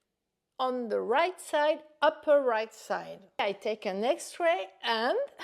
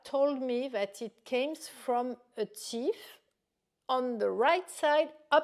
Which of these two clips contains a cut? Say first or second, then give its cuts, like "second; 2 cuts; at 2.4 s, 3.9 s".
first; 1 cut; at 3.4 s